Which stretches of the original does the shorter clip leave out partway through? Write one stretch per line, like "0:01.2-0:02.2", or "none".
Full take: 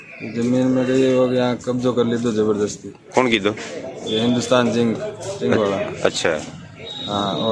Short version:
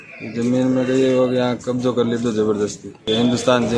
0:02.9-0:03.9